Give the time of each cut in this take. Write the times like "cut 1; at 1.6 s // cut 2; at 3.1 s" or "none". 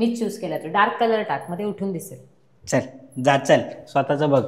none